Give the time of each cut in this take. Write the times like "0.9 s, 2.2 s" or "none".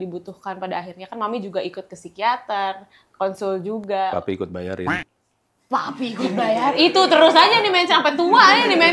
none